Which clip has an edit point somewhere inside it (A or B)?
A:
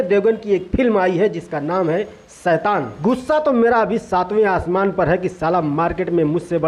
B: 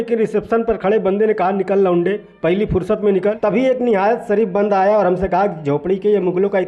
B